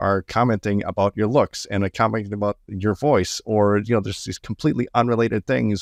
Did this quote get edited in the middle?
no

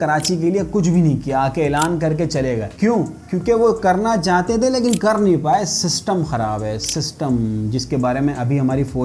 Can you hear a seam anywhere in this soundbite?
no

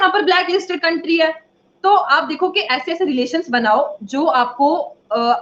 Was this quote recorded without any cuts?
yes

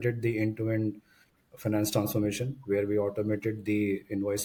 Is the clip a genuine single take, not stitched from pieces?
yes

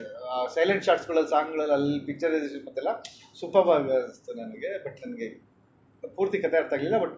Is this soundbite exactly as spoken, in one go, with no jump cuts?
yes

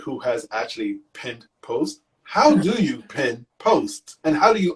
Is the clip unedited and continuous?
yes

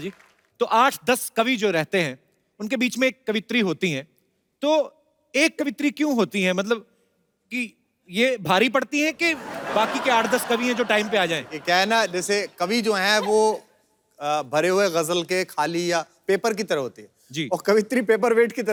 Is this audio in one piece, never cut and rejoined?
yes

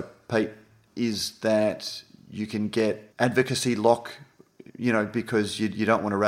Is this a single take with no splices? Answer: no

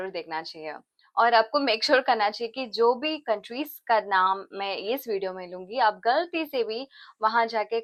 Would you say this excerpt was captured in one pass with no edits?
yes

